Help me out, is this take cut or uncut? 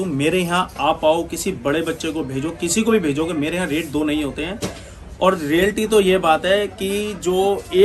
uncut